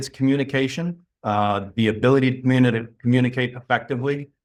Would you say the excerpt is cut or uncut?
uncut